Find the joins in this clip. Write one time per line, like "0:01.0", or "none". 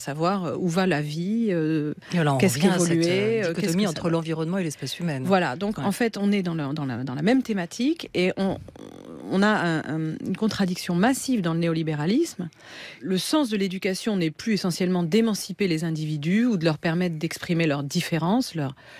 0:13.0